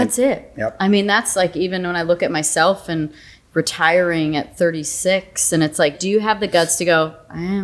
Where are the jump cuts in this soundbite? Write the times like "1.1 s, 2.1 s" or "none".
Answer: 6.0 s